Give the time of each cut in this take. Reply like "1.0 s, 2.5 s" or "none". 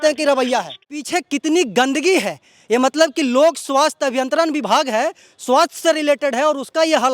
1.0 s